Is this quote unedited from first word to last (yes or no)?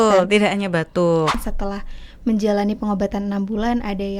no